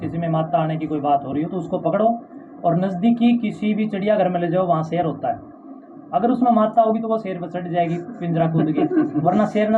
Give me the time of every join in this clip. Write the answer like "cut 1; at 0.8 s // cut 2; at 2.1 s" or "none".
none